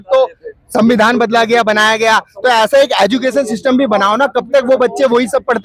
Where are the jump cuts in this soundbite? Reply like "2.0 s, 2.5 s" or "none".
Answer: none